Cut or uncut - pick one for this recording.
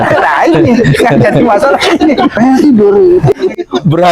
uncut